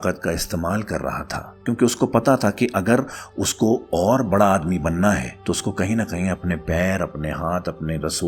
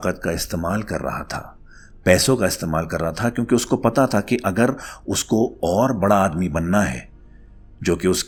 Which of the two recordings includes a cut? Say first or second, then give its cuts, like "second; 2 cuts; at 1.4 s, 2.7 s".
first; 2 cuts; at 1.6 s, 5.3 s